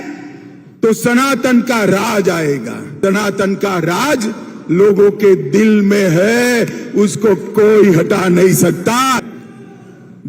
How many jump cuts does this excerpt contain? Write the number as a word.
two